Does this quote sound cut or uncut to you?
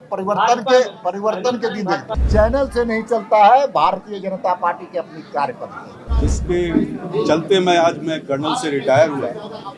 cut